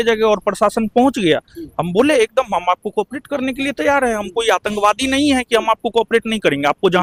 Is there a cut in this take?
no; 0 cuts

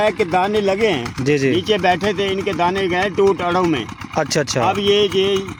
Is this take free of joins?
yes; 0 cuts

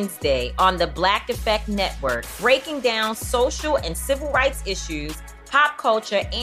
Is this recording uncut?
yes; 0 cuts

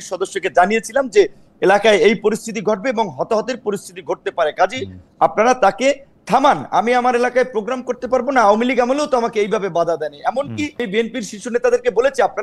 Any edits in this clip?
yes; 1 cut; at 10.8 s

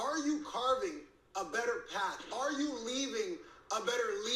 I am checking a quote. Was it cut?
no; 0 cuts

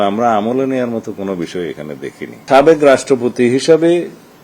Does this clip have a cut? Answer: yes; 1 cut; at 2.4 s

